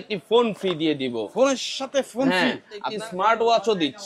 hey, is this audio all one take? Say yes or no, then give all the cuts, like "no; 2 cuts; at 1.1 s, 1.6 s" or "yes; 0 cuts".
no; 1 cut; at 2.9 s